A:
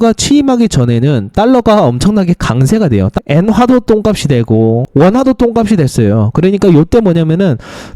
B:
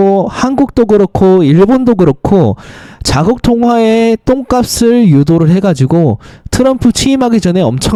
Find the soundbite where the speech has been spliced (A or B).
A